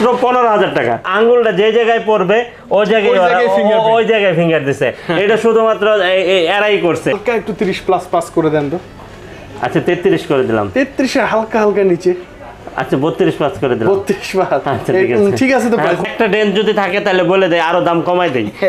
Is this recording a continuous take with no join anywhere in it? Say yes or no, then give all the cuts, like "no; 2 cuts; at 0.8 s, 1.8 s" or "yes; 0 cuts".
no; 3 cuts; at 1.1 s, 7.1 s, 16.0 s